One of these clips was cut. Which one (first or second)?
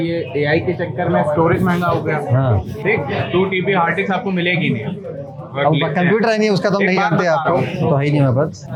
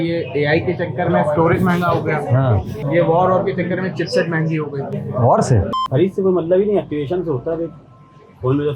second